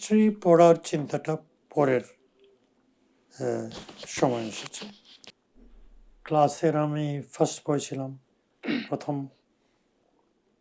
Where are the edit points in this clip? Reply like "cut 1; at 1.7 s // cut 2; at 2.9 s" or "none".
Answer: cut 1; at 5.1 s